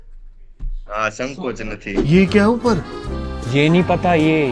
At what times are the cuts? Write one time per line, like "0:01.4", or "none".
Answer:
0:01.9